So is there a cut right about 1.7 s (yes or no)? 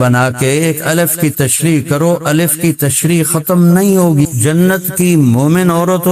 no